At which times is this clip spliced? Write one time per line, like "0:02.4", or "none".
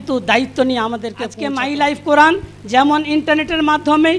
0:01.3